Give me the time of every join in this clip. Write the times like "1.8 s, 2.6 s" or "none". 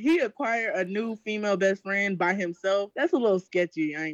2.9 s